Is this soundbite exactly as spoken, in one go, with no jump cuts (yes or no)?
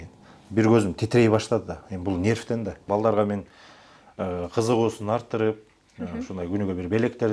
no